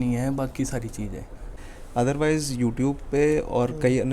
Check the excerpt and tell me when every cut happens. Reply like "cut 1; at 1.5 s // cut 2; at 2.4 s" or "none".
cut 1; at 1.5 s